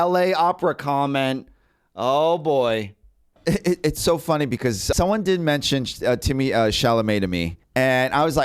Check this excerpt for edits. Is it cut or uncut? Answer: uncut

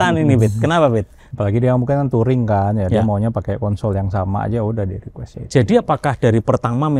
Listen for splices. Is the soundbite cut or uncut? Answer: cut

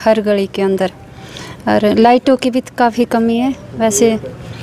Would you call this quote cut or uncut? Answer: uncut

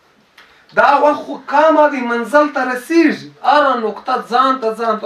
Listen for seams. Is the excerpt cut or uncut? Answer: cut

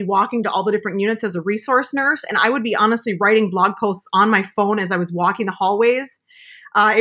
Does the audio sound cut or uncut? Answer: uncut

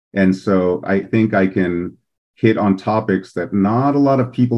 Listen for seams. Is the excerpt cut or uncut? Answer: cut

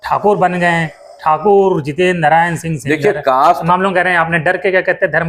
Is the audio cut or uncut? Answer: cut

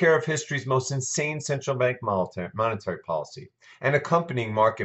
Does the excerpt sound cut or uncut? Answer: cut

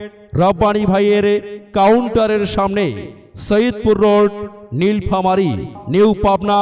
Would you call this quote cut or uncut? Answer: cut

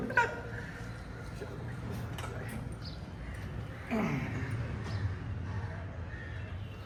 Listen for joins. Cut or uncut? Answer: uncut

